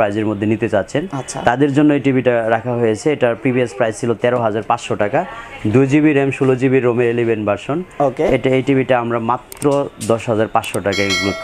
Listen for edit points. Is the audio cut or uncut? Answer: uncut